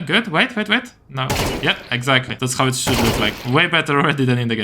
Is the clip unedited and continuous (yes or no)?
no